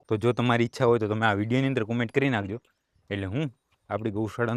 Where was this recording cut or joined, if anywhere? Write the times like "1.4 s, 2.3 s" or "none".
none